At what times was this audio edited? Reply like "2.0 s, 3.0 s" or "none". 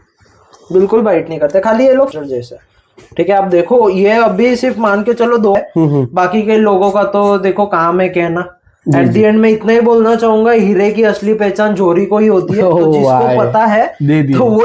2.1 s, 5.6 s